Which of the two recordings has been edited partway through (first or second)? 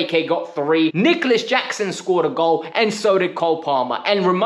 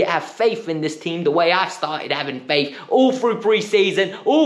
first